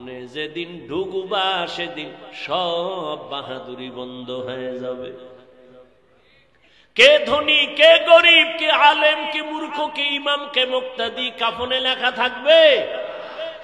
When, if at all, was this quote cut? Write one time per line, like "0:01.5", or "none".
none